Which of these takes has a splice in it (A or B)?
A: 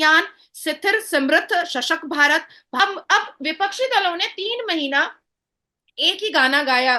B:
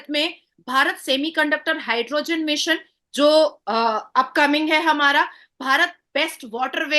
A